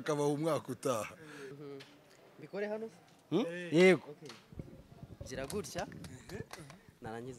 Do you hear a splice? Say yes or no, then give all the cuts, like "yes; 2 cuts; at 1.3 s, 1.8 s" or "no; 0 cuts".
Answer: yes; 1 cut; at 1.5 s